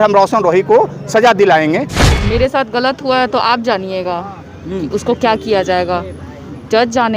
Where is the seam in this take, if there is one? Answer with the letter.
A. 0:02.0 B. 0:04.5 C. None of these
A